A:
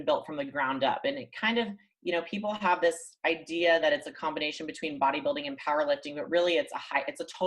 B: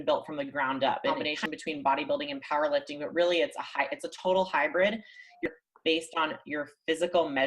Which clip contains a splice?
B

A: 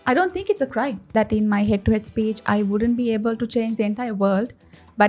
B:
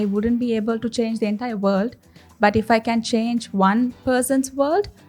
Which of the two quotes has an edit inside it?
A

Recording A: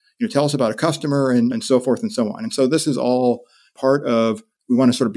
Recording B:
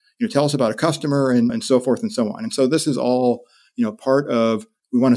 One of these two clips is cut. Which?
A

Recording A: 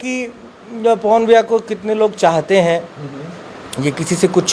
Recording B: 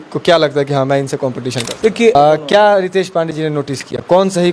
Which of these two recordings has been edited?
B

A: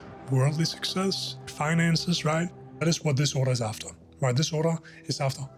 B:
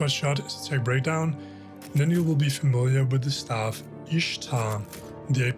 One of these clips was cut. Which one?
A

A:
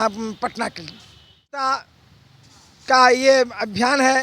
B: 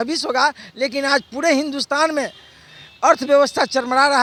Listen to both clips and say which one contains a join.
A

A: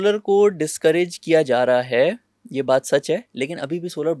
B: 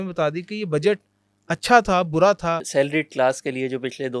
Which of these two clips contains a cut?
B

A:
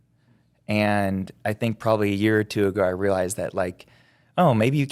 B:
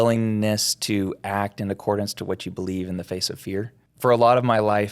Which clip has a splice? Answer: B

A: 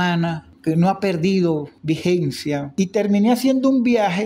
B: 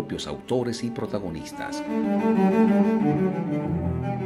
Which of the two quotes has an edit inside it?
A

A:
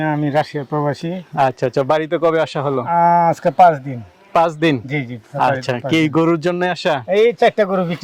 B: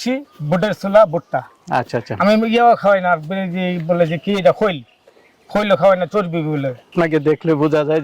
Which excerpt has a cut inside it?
B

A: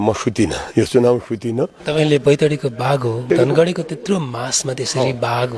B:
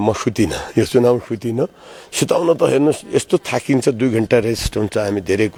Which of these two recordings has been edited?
A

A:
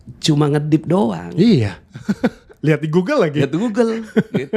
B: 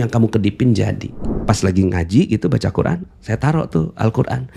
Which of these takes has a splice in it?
B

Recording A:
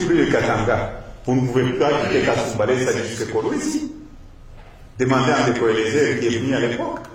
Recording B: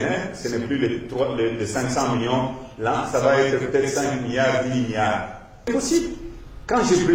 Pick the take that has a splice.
B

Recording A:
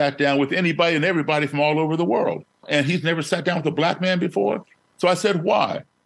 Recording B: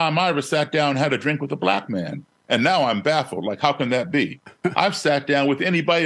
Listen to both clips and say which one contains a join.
A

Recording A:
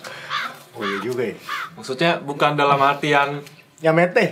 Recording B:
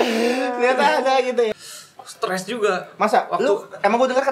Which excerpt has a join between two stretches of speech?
B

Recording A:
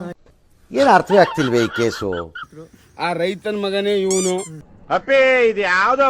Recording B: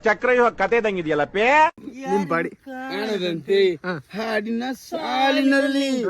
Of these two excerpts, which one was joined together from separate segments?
B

